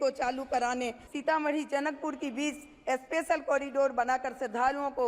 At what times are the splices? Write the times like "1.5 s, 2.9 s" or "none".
1.0 s